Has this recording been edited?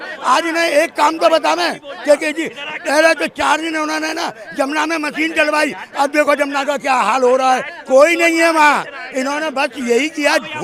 no; 0 cuts

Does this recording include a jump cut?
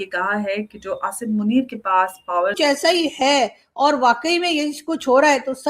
yes; 1 cut; at 2.6 s

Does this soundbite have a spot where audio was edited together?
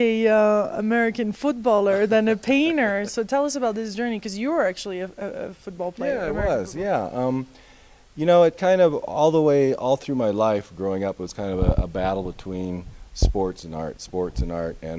no; 0 cuts

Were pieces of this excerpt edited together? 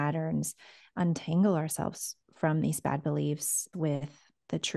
yes; 1 cut; at 3.7 s

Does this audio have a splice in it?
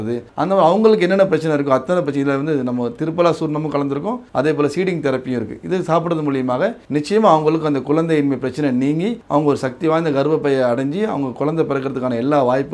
no; 0 cuts

